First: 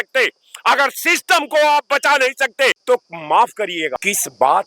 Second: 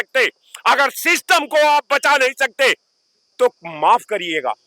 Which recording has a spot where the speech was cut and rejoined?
first; 2 cuts; at 2.8 s, 3.9 s

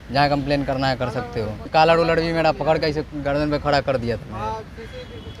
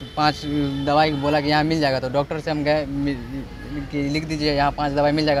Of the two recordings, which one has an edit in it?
first; 1 cut; at 1.7 s

